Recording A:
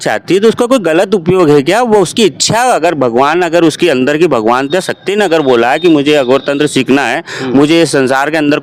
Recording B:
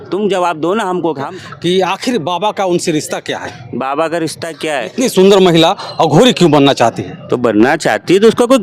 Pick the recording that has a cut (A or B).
B